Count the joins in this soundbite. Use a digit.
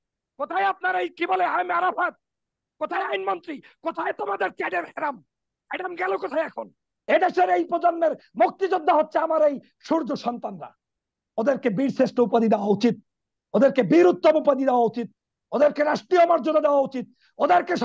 1